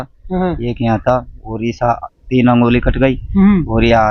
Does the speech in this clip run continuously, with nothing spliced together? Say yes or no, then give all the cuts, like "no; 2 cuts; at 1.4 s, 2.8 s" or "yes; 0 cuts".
yes; 0 cuts